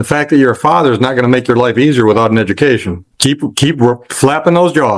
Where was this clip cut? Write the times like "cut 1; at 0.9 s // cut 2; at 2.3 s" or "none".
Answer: cut 1; at 3.0 s